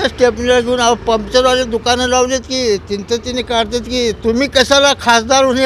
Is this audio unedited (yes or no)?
yes